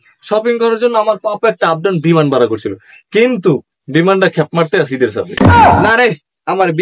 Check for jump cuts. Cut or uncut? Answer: uncut